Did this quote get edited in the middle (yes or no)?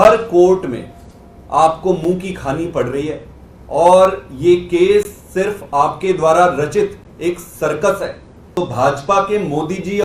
yes